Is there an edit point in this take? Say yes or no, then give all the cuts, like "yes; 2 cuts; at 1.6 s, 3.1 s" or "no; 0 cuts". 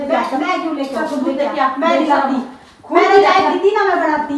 no; 0 cuts